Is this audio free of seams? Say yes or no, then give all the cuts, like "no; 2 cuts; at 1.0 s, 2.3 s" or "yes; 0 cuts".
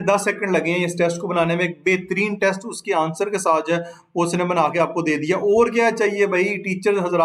yes; 0 cuts